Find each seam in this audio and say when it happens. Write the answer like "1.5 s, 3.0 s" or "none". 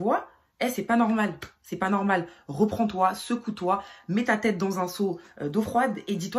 none